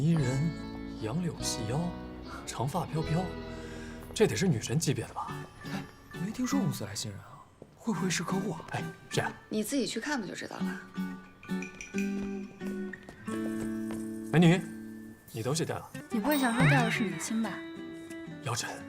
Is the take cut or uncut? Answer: cut